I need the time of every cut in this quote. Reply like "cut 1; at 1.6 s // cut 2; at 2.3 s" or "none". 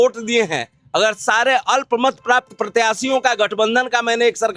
none